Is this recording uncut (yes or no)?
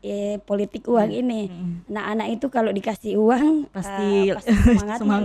yes